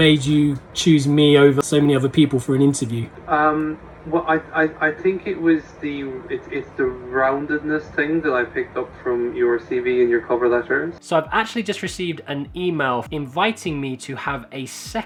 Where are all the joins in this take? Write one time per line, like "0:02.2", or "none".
none